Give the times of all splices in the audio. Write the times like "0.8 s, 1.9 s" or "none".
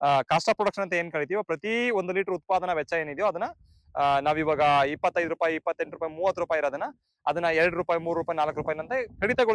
none